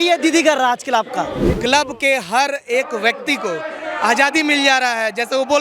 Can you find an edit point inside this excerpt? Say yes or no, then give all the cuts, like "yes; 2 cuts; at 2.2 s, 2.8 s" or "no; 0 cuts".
yes; 1 cut; at 1.4 s